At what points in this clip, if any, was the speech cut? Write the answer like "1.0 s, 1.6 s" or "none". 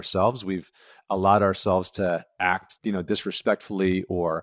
2.7 s